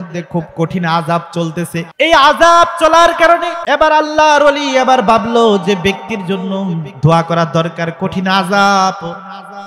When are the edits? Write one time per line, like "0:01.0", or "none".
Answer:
0:01.9
0:03.5